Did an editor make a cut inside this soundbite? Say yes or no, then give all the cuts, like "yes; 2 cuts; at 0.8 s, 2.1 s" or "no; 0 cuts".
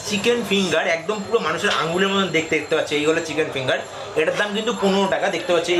no; 0 cuts